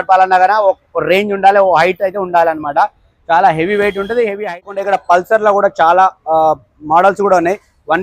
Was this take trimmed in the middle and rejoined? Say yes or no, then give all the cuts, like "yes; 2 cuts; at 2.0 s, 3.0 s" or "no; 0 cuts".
yes; 1 cut; at 4.7 s